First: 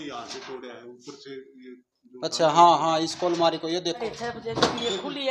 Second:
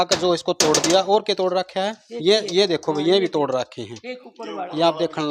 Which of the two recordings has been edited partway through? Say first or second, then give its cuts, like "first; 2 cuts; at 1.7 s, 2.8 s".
first; 1 cut; at 4.0 s